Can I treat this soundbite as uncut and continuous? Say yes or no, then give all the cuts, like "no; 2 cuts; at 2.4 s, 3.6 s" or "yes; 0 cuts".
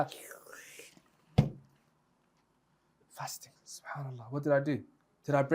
no; 1 cut; at 3.0 s